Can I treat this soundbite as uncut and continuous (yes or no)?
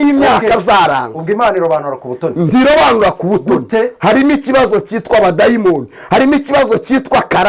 yes